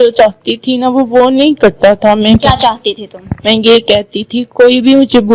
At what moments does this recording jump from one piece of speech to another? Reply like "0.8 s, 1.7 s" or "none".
none